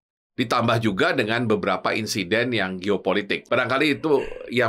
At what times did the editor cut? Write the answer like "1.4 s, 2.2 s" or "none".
3.4 s